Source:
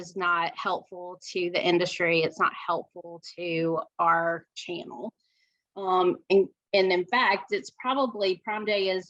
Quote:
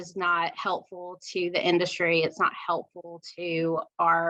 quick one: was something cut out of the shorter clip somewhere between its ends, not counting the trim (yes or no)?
no